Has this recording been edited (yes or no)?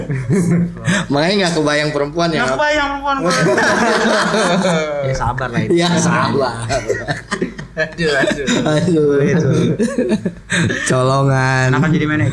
no